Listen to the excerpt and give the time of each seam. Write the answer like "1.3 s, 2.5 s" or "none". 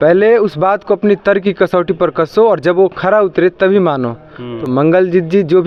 none